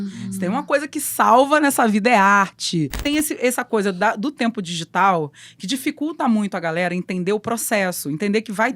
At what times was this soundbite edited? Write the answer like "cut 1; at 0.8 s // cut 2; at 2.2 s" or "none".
cut 1; at 3.0 s